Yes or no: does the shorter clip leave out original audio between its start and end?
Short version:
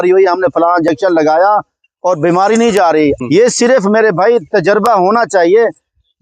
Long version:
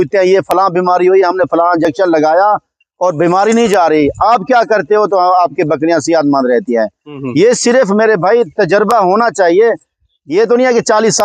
yes